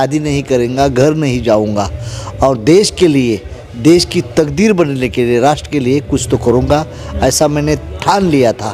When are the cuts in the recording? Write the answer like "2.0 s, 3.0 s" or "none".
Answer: none